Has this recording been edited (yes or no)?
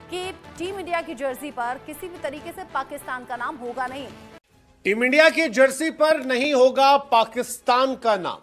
yes